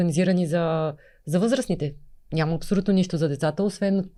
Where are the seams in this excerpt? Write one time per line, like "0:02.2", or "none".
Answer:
none